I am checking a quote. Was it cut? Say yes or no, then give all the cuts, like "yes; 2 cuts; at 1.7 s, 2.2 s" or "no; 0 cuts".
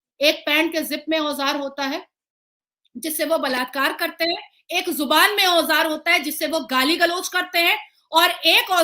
no; 0 cuts